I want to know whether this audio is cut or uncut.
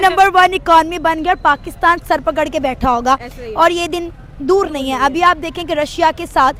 uncut